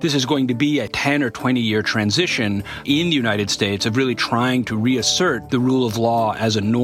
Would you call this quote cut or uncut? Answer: cut